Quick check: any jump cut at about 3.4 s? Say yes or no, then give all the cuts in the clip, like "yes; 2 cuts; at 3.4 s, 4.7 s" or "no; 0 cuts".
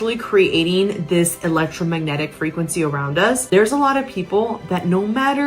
yes; 1 cut; at 3.4 s